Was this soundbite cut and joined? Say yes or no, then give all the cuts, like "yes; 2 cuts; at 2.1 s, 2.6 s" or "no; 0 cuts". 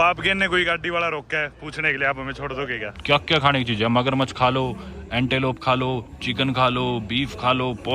yes; 1 cut; at 2.9 s